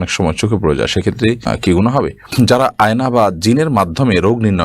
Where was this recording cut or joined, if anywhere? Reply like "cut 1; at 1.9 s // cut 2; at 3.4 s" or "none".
cut 1; at 1.5 s // cut 2; at 2.3 s